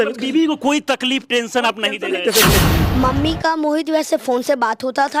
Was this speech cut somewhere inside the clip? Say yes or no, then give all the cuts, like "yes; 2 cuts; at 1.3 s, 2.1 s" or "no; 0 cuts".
yes; 1 cut; at 2.6 s